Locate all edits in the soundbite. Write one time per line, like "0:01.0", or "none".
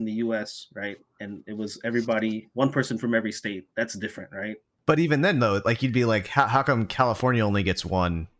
0:04.7